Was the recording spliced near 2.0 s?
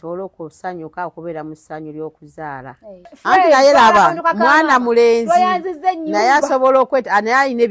no; 1 cut; at 3.2 s

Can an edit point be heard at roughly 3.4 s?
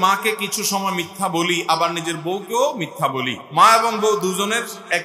yes; 1 cut; at 3.4 s

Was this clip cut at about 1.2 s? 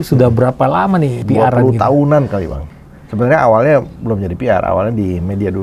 yes; 2 cuts; at 1.2 s, 2.6 s

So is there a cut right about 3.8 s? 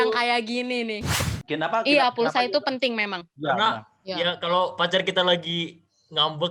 no; 1 cut; at 1.1 s

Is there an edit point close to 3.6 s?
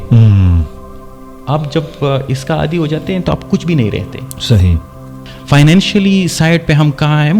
no; 1 cut; at 5.2 s

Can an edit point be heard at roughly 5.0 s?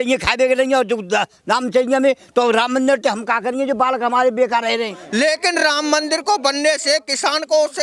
yes; 1 cut; at 5.0 s

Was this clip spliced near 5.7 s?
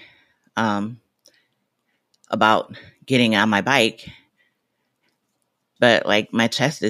yes; 1 cut; at 5.7 s

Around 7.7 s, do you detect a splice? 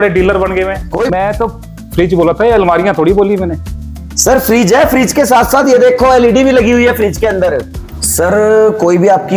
yes; 2 cuts; at 1.1 s, 7.7 s

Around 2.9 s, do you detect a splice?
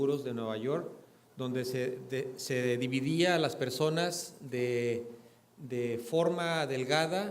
yes; 1 cut; at 2.9 s

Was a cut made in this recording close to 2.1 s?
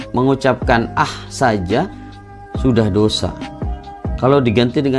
no; 0 cuts

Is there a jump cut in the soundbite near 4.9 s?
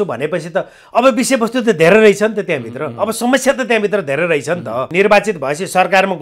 yes; 1 cut; at 4.9 s

